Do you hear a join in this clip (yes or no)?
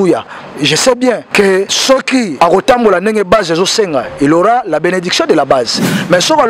no